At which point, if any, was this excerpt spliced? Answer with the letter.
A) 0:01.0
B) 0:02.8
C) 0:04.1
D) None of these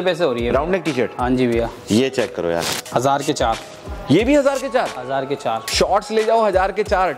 B